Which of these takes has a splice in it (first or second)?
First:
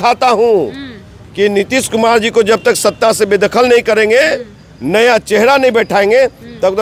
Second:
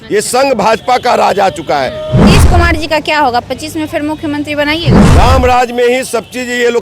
second